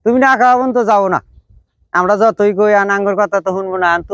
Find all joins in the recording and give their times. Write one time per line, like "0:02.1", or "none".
none